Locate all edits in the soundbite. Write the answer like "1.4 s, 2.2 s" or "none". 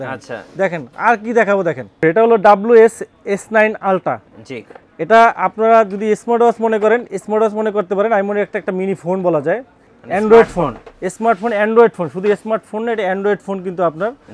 2.0 s